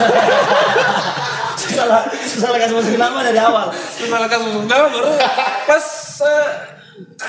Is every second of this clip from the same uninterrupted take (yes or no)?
yes